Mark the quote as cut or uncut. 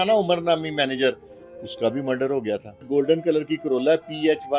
cut